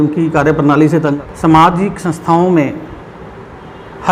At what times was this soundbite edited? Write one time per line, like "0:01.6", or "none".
0:01.1